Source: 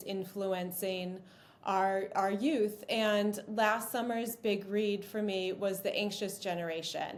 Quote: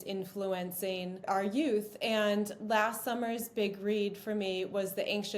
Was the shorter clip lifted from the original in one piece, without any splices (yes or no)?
no